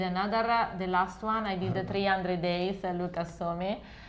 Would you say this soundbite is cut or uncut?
uncut